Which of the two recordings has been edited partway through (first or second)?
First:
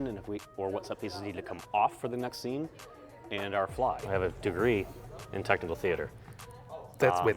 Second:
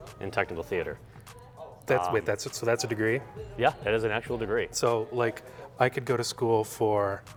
first